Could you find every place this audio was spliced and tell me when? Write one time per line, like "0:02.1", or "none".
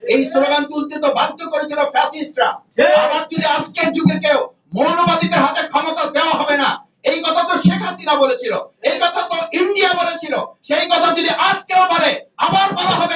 none